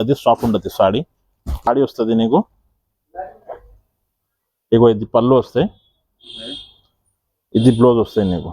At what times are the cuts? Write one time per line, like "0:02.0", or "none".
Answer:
0:01.7

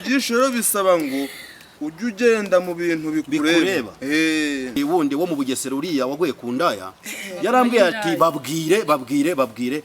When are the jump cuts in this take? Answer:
0:04.8

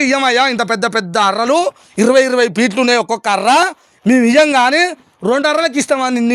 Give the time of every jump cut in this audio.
none

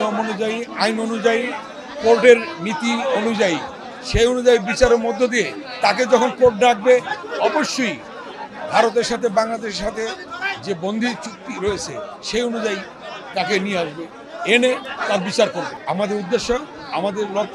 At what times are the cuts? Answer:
0:15.7

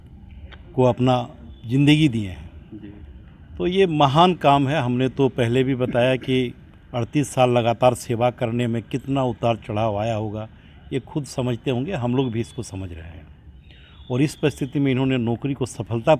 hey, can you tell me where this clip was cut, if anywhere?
none

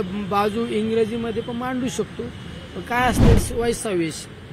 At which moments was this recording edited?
0:03.4

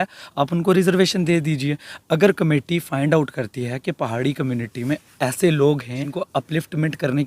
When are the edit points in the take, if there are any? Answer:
0:06.0

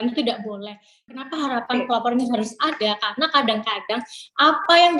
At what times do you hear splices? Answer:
0:01.0

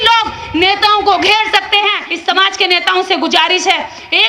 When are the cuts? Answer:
0:02.1

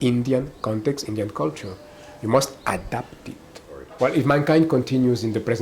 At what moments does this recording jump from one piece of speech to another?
0:03.9

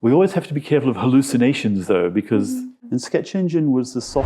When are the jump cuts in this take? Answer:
0:02.7

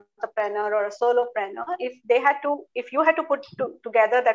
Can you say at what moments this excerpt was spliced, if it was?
none

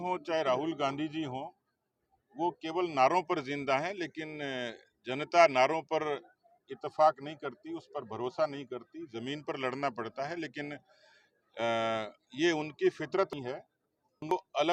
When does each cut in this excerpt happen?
none

